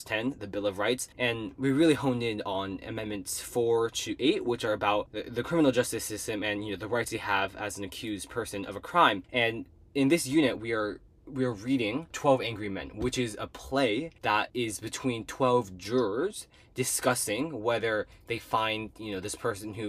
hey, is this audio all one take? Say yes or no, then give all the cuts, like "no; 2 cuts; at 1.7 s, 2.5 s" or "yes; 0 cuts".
no; 5 cuts; at 1.1 s, 5.2 s, 9.2 s, 12.1 s, 14.3 s